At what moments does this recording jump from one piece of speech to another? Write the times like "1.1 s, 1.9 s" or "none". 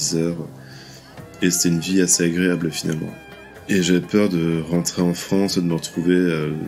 3.3 s